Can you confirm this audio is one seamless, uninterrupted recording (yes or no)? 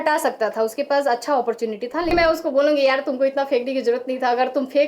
no